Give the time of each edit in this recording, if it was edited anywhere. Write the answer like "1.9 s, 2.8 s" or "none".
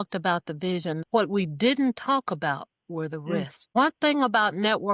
1.0 s, 3.6 s

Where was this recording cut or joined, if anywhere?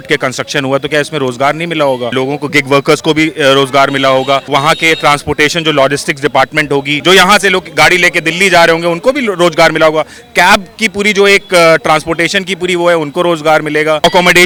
none

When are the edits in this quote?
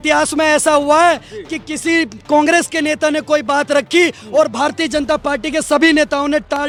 none

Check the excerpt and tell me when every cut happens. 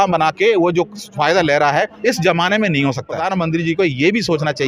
3.2 s

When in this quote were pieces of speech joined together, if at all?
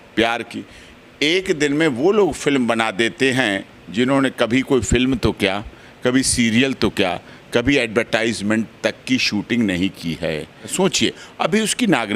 10.7 s

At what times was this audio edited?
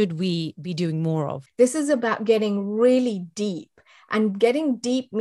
1.4 s

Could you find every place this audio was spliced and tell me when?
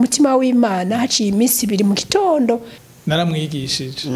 2.8 s

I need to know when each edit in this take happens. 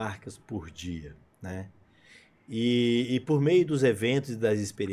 none

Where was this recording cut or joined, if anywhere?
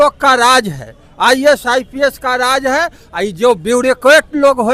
none

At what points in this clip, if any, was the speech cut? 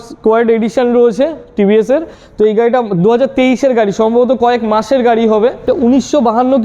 5.7 s

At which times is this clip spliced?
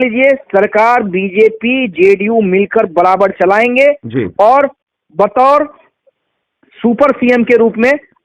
none

